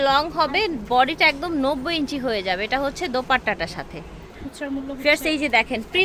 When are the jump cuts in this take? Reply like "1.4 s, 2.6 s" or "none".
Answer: none